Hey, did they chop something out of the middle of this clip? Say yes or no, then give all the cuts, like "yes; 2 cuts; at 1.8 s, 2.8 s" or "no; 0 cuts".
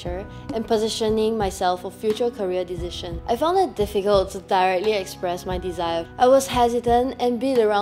yes; 2 cuts; at 3.1 s, 6.1 s